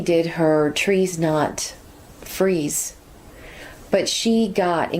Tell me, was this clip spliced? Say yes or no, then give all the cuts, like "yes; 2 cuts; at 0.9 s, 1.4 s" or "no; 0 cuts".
no; 0 cuts